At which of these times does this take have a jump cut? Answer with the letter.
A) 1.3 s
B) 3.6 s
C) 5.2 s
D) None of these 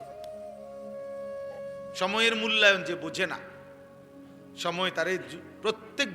A